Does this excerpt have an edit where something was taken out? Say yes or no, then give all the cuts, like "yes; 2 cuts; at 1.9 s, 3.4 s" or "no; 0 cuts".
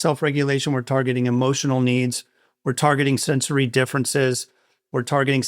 no; 0 cuts